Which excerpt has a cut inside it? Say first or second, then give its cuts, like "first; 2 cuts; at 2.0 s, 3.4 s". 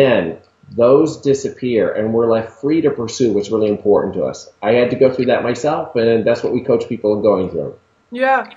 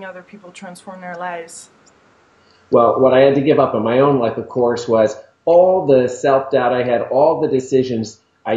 second; 1 cut; at 5.3 s